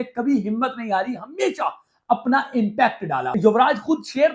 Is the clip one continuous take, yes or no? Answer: no